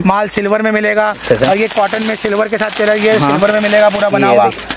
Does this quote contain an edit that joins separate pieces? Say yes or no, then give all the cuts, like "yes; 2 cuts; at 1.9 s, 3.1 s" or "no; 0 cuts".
no; 0 cuts